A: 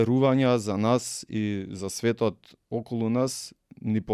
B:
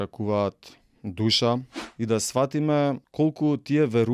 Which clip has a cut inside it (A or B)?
B